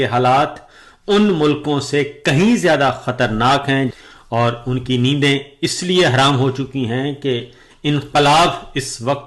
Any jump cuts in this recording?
yes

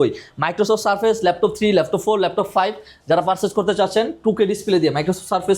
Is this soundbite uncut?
yes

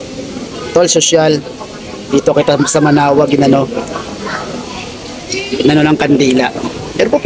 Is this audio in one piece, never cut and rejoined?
yes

